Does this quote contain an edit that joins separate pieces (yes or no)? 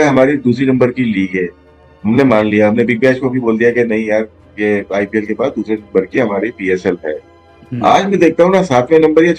no